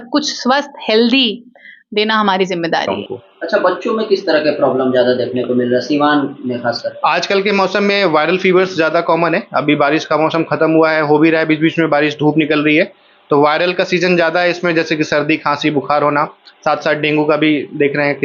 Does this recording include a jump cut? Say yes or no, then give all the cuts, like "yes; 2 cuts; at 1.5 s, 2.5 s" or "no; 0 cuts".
yes; 1 cut; at 2.9 s